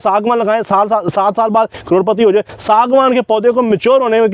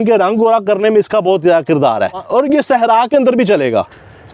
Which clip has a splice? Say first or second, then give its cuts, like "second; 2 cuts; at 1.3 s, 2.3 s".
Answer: second; 1 cut; at 2.2 s